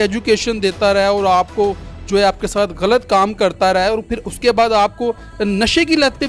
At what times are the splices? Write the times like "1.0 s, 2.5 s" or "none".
none